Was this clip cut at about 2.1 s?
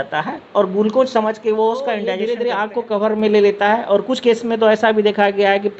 yes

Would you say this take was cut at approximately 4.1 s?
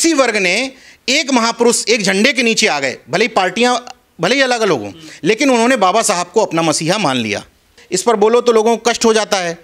no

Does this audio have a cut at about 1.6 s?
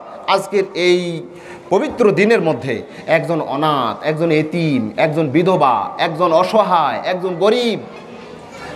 no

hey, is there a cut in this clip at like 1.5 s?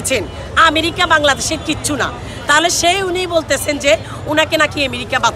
no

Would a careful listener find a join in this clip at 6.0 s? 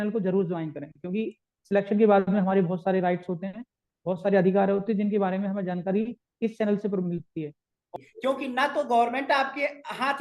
no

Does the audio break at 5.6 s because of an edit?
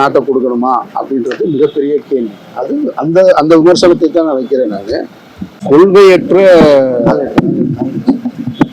yes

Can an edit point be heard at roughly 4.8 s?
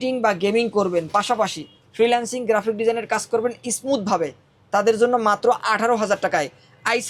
no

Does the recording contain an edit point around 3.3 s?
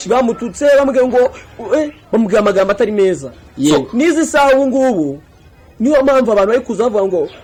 no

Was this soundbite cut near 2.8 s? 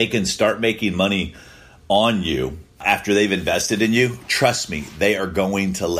yes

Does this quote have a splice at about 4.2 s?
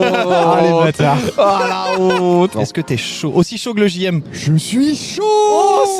no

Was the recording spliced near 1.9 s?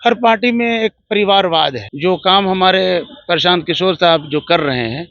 yes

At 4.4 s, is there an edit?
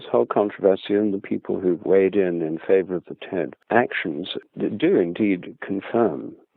yes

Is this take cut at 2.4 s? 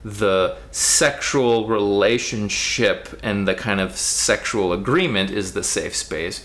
no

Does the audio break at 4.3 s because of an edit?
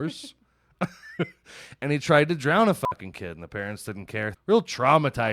yes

